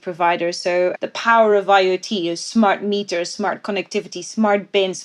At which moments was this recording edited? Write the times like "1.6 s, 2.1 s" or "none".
1.0 s